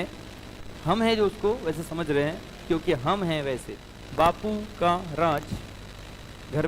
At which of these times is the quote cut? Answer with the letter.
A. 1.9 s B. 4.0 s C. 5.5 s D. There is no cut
B